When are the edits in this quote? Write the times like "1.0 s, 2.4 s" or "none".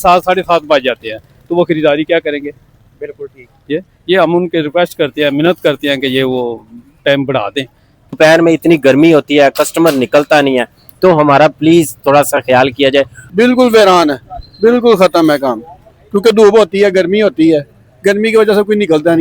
8.1 s, 13.2 s

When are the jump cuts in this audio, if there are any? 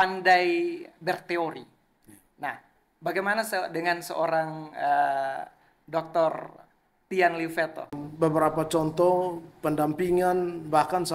7.9 s

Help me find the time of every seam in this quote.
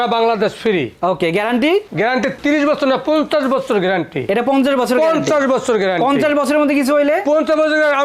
none

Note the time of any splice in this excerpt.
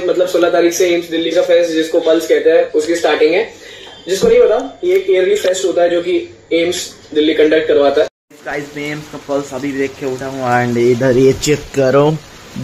none

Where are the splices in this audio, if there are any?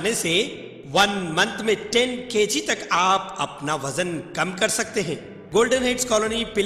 5.3 s

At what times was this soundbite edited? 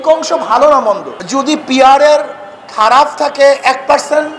1.1 s

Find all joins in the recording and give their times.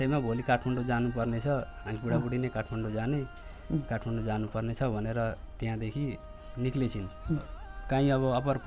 7.6 s

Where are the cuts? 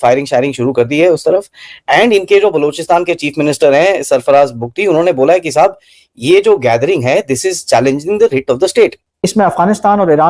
9.3 s

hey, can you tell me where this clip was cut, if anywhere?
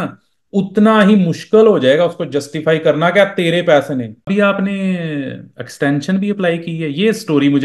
4.3 s

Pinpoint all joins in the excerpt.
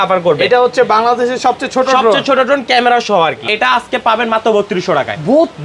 3.5 s

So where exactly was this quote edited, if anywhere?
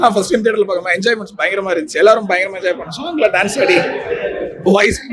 none

